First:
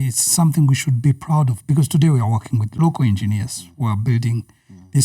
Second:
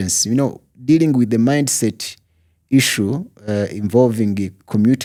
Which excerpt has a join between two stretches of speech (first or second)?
first